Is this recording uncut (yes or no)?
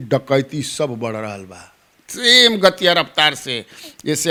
yes